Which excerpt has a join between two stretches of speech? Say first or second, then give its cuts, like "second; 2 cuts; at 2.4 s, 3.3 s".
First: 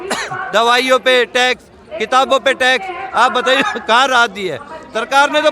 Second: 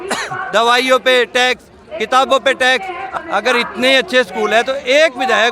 second; 1 cut; at 3.0 s